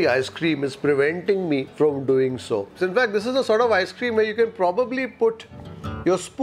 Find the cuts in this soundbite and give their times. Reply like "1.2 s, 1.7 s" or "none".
1.7 s, 2.7 s